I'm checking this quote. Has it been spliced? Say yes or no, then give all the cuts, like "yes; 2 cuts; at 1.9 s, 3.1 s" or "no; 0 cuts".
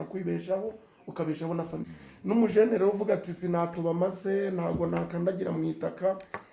yes; 1 cut; at 1.8 s